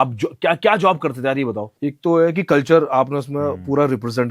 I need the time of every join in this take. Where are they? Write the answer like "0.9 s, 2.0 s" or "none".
1.7 s